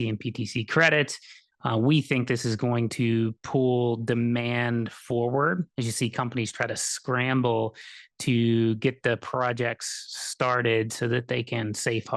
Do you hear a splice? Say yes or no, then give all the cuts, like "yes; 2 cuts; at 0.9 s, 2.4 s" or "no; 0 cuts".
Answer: no; 0 cuts